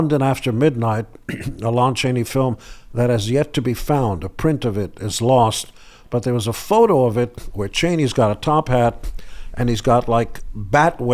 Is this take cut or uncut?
uncut